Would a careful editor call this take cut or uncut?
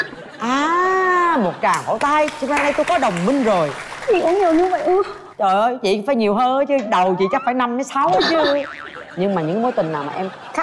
uncut